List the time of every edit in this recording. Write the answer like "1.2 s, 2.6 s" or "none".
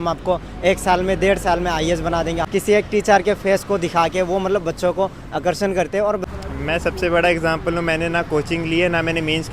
2.5 s, 6.1 s